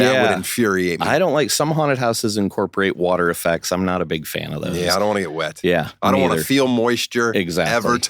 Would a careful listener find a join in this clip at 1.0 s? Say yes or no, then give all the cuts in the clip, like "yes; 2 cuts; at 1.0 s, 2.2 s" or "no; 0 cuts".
yes; 1 cut; at 1.0 s